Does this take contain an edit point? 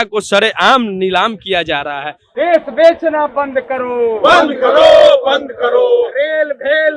yes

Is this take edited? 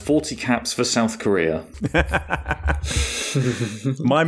yes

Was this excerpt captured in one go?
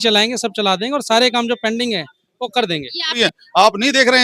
no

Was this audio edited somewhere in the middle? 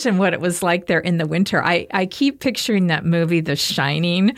no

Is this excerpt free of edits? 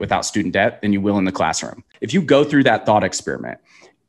no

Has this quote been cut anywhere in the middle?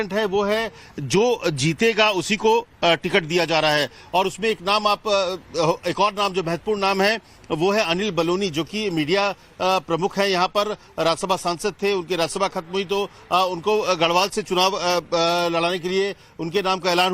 yes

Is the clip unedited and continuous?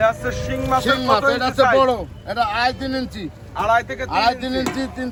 yes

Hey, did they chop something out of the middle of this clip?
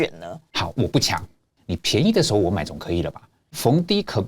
yes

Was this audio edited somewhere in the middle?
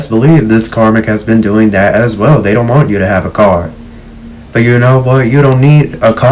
no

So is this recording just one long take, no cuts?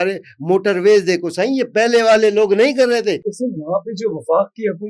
no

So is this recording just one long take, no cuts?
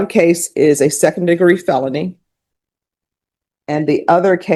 yes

